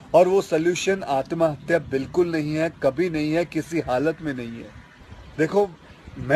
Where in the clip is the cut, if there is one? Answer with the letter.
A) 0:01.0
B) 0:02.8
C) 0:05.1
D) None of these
C